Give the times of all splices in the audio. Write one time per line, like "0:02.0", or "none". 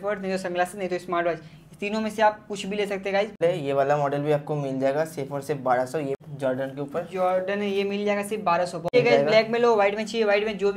0:03.4
0:06.2
0:08.9